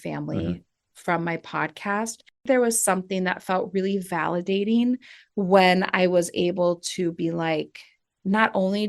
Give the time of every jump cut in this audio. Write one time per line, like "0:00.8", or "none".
0:02.4